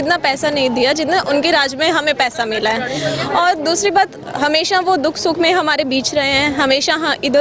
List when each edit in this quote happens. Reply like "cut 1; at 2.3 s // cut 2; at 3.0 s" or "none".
none